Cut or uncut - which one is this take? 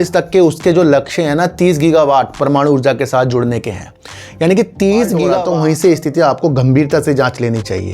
cut